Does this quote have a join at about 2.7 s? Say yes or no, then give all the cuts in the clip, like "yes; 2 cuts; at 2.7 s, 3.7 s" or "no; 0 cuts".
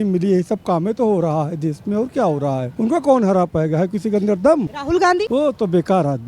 yes; 2 cuts; at 2.7 s, 5.1 s